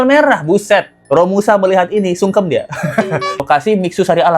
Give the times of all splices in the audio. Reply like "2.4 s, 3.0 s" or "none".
3.4 s